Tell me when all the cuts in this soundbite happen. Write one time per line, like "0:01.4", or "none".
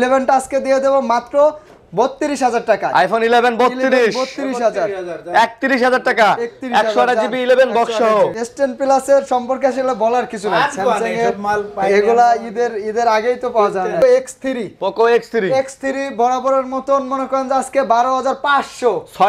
0:08.4
0:14.0